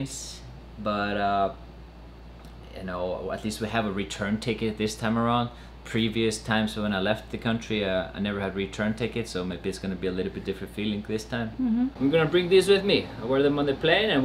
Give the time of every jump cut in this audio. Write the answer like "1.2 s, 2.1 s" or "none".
11.9 s